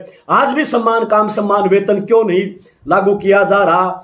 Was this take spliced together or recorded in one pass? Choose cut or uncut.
uncut